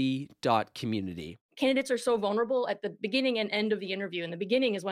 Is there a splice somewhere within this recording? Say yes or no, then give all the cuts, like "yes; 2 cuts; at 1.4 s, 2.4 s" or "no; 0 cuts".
yes; 1 cut; at 1.3 s